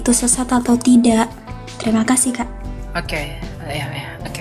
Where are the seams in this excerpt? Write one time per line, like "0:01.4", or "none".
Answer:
none